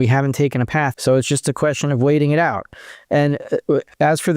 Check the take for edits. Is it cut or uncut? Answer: cut